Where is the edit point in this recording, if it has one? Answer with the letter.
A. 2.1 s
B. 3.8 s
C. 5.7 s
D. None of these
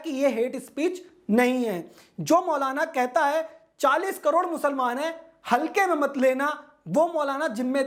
D